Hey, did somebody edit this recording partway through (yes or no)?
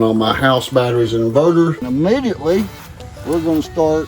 yes